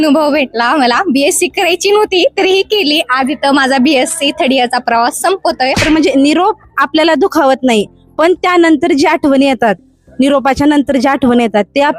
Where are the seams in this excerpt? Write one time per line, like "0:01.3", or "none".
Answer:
0:05.9